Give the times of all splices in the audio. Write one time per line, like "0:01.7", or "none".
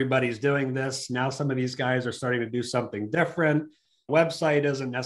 0:04.0